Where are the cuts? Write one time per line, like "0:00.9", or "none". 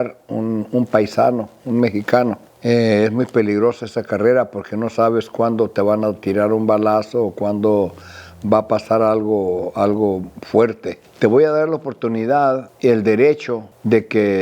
0:11.0